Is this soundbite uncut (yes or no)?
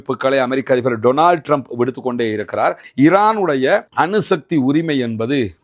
no